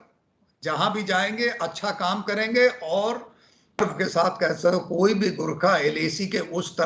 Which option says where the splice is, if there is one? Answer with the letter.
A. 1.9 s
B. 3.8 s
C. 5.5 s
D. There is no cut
B